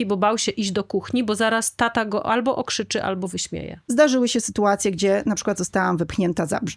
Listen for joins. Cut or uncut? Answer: cut